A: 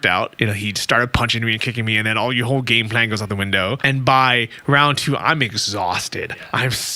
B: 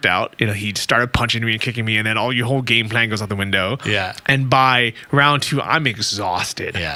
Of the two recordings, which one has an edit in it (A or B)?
A